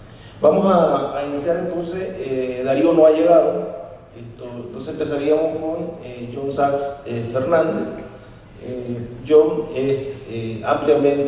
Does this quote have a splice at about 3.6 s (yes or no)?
no